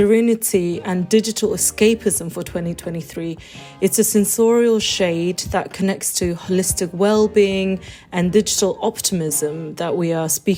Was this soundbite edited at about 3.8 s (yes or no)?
no